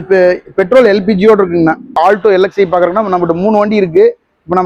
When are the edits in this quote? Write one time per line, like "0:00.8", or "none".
none